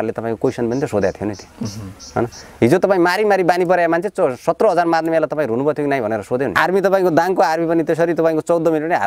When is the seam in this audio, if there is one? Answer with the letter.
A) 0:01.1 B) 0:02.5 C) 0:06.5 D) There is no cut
C